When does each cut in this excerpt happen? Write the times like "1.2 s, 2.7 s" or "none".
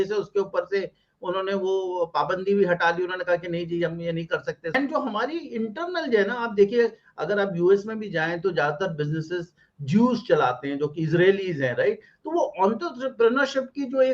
4.7 s